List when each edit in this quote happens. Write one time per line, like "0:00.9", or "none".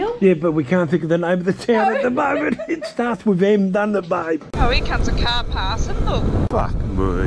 0:04.5
0:06.5